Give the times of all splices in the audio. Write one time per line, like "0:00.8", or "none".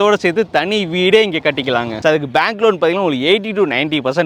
none